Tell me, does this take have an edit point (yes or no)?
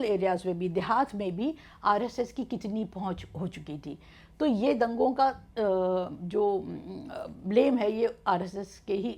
no